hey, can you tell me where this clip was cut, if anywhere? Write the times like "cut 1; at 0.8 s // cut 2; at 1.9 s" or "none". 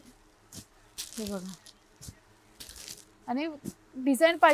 none